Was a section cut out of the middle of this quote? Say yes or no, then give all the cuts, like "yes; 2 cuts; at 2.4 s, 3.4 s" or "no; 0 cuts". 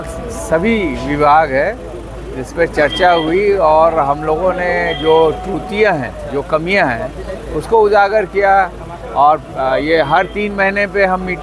no; 0 cuts